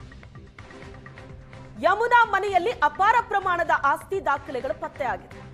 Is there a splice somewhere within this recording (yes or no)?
yes